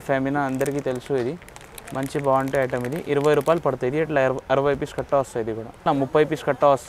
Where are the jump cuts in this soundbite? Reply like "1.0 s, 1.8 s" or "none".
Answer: 5.8 s